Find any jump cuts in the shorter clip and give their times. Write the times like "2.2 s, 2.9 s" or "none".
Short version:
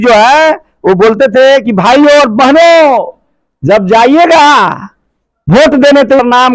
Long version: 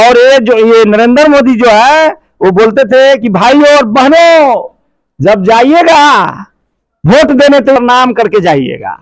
none